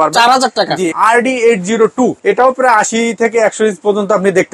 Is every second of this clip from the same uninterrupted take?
no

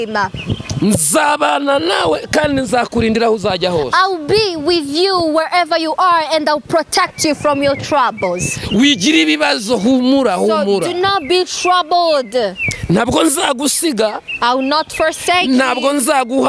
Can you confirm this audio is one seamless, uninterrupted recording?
yes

